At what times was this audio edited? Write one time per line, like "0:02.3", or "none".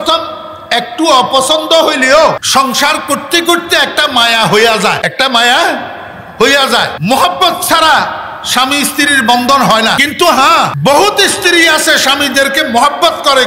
0:02.4
0:05.0
0:07.0
0:10.0
0:10.7